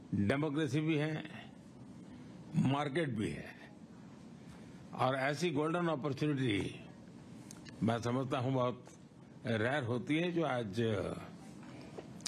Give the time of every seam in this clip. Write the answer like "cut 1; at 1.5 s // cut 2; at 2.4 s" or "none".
none